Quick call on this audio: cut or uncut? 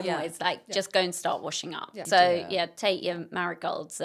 cut